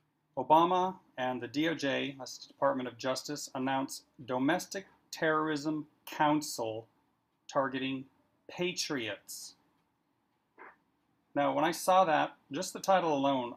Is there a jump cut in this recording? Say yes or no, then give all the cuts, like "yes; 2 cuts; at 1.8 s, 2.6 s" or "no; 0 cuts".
no; 0 cuts